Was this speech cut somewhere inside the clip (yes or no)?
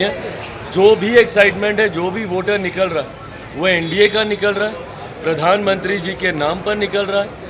no